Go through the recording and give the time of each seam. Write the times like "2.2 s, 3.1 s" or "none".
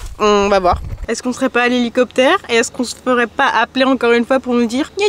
1.0 s